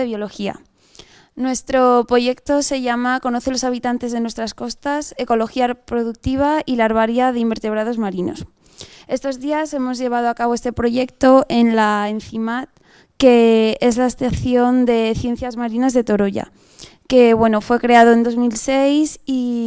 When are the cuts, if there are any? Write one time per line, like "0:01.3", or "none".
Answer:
0:06.7